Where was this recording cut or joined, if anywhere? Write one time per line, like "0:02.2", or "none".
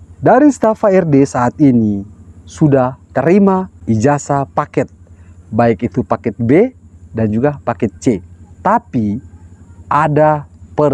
0:03.7